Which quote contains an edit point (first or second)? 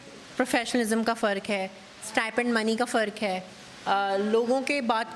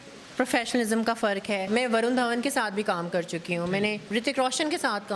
second